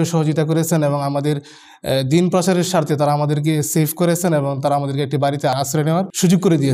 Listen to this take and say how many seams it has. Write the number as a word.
one